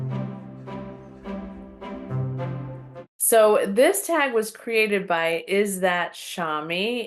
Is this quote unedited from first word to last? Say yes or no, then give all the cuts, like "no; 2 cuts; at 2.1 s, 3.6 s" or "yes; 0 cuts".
no; 1 cut; at 2.9 s